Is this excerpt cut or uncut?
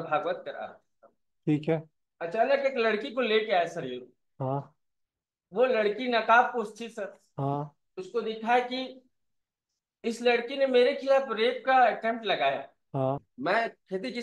cut